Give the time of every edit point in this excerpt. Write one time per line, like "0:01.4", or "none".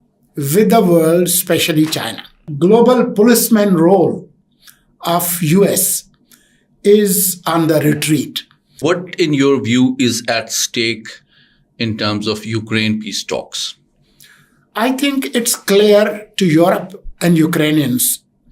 0:02.5
0:08.8